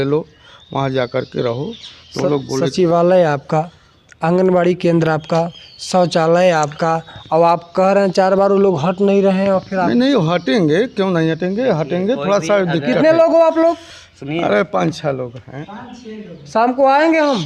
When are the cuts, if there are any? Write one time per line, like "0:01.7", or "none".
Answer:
none